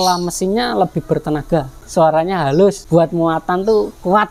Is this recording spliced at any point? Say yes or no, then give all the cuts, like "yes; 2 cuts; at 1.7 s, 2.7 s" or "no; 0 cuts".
yes; 2 cuts; at 1.8 s, 2.8 s